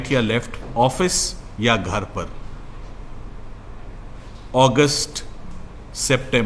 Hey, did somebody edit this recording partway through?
no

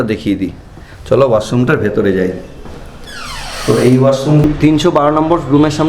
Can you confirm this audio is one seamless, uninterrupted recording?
no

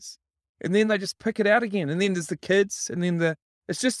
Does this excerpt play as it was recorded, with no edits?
yes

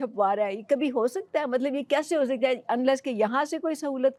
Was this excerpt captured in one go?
yes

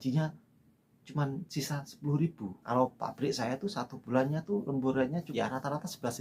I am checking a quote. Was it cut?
yes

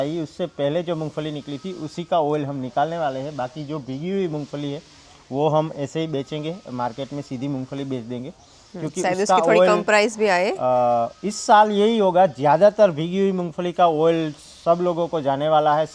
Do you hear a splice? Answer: no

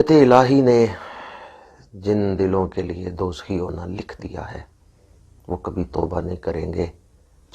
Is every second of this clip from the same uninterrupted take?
yes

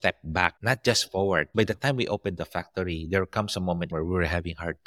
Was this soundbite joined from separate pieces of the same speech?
yes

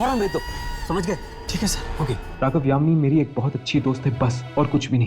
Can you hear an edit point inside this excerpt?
yes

